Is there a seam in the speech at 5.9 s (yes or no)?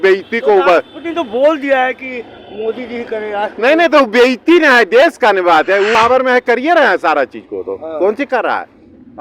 yes